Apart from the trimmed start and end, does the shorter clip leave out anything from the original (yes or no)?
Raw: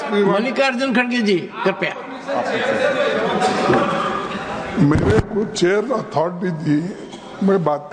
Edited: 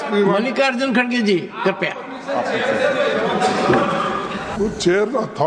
yes